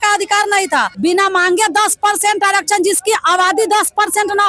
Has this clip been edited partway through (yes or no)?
yes